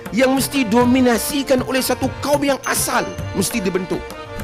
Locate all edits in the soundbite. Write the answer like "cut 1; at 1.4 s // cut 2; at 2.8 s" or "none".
none